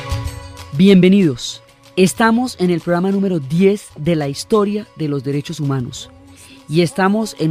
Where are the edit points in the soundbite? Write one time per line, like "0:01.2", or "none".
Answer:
none